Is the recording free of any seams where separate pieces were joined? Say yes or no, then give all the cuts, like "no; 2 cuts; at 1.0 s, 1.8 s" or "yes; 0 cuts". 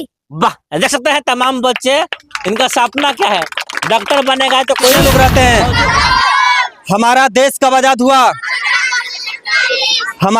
no; 1 cut; at 5.0 s